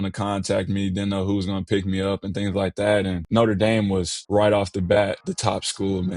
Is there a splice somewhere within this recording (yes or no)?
yes